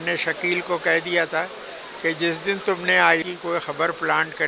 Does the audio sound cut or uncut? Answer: uncut